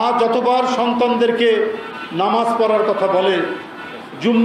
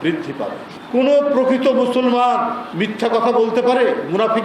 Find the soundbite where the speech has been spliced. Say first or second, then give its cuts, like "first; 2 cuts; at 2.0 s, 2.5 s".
second; 1 cut; at 2.6 s